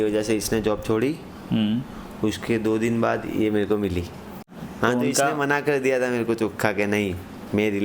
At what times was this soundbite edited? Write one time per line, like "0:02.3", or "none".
0:04.5

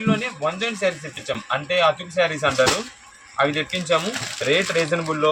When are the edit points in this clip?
none

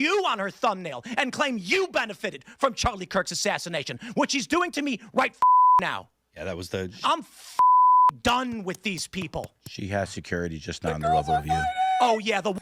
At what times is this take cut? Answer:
none

